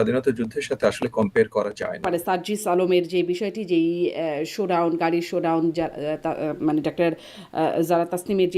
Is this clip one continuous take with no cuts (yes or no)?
no